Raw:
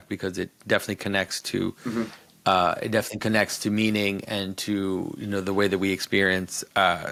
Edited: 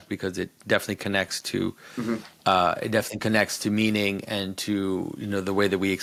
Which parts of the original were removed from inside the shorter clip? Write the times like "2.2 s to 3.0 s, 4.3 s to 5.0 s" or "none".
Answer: none